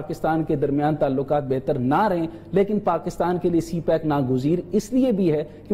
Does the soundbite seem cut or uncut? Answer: uncut